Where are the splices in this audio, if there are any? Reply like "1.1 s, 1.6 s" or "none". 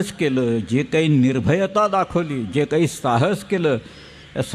none